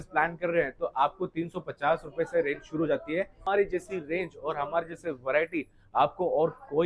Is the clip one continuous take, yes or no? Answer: no